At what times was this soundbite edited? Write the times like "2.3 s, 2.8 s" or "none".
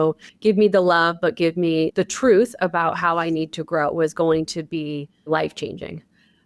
1.9 s, 5.3 s